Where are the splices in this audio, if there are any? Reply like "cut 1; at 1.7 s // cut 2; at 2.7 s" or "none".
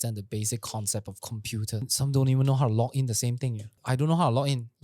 cut 1; at 1.9 s // cut 2; at 3.8 s

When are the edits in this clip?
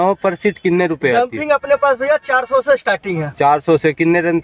none

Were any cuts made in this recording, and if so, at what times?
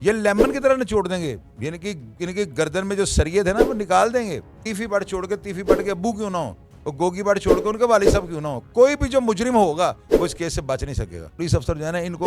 cut 1; at 4.6 s // cut 2; at 11.3 s

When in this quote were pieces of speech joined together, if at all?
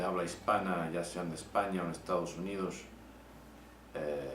cut 1; at 2.3 s

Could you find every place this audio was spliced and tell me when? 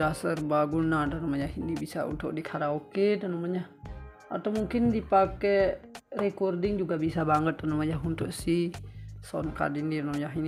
none

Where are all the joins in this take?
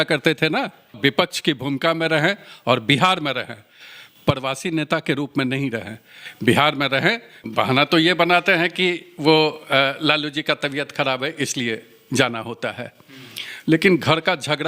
cut 1; at 1.0 s // cut 2; at 7.4 s

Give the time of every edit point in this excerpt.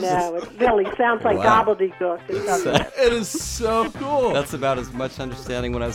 none

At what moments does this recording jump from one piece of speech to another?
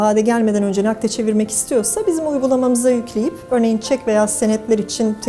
none

